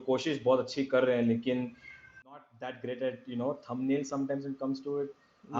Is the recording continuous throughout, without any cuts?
no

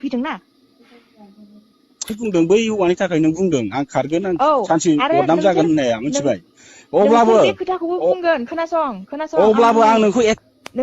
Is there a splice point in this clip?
no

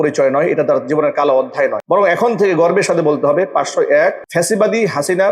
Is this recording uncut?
no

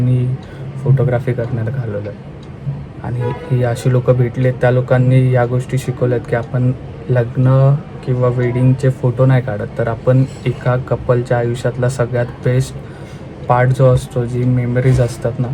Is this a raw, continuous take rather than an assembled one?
yes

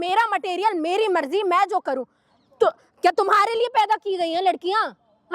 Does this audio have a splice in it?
no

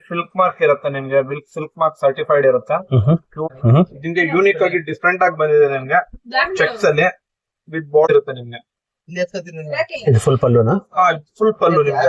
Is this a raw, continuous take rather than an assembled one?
no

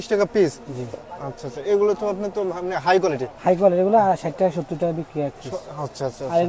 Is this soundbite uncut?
yes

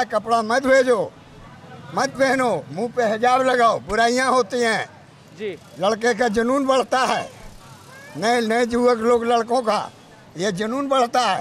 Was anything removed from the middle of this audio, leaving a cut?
no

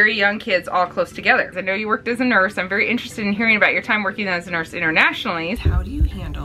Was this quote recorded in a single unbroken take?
no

